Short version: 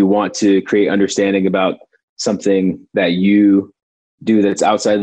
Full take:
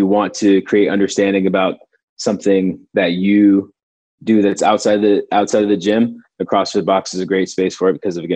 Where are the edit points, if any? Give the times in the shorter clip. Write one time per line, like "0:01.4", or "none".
none